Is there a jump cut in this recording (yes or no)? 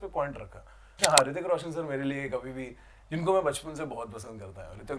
yes